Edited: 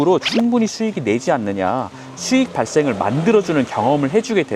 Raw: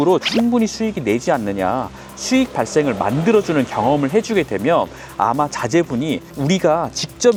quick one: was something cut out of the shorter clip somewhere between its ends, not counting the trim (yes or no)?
no